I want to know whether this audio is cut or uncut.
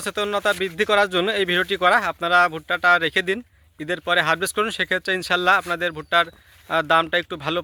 uncut